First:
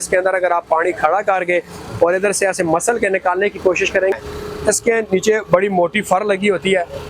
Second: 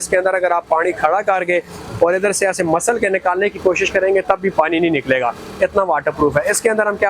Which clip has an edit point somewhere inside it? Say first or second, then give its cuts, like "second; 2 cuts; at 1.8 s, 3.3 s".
first; 1 cut; at 4.1 s